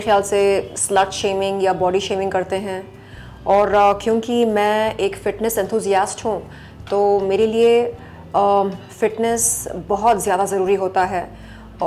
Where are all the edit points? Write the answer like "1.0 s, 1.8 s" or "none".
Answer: none